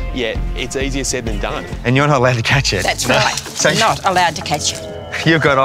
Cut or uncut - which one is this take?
cut